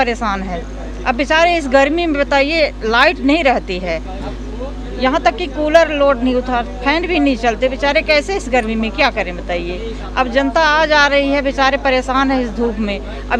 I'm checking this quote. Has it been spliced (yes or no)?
no